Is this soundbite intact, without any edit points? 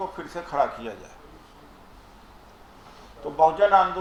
yes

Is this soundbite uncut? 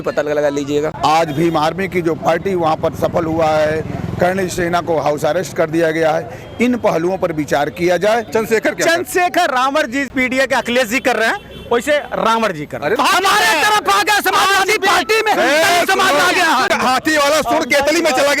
no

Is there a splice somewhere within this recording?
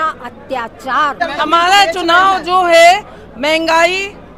yes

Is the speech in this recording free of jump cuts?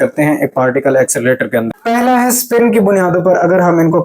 no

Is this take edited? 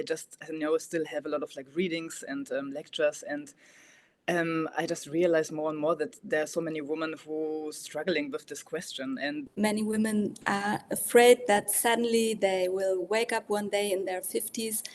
yes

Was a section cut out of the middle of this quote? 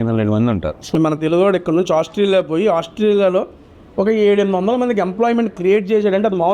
yes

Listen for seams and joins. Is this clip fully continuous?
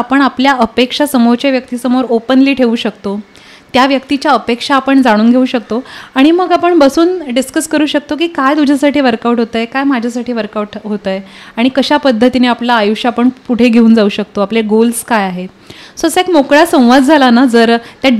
yes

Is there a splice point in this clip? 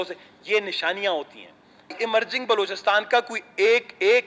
yes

